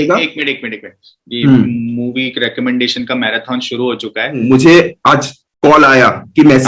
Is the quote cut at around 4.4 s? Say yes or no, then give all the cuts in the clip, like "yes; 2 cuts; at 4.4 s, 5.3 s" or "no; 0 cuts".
yes; 1 cut; at 4.4 s